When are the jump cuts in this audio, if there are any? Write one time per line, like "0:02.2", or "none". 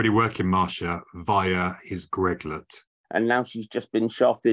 0:02.9